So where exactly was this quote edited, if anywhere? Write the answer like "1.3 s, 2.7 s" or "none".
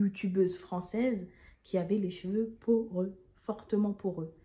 none